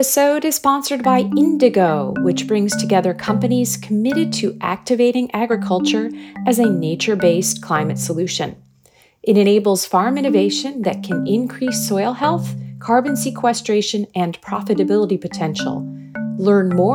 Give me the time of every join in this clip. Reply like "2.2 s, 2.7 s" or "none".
none